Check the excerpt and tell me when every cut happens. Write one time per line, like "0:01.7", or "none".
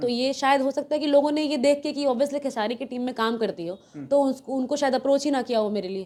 none